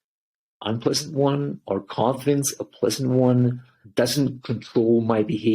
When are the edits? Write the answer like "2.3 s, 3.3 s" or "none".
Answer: 3.8 s

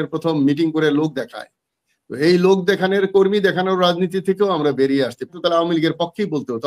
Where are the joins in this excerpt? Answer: 5.3 s

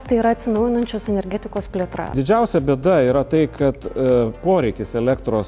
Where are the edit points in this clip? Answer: 2.1 s

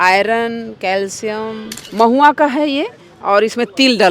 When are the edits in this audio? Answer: 1.8 s

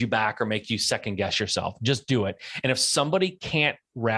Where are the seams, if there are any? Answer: none

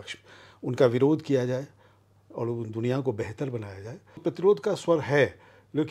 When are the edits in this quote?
4.2 s

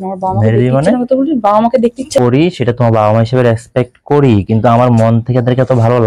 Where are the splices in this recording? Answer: 2.2 s

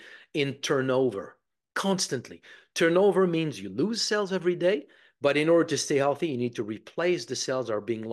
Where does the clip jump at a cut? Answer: none

